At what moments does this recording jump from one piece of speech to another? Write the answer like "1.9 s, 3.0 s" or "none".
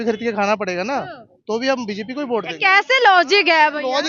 none